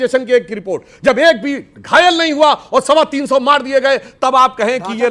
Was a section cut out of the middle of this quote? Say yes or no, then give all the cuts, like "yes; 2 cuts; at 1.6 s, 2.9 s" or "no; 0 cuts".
no; 0 cuts